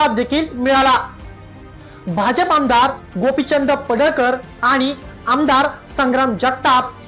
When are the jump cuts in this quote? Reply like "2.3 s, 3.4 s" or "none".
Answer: 1.4 s

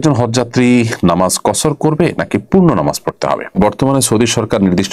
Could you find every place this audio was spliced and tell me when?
3.6 s

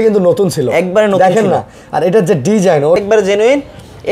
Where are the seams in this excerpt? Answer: 3.0 s

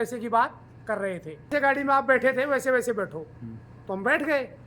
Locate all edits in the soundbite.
1.5 s

